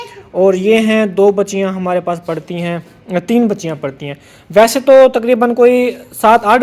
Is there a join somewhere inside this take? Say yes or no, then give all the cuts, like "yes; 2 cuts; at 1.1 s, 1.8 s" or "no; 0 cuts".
no; 0 cuts